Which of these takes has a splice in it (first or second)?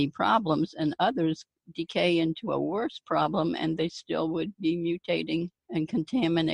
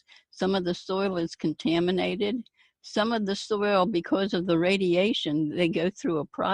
first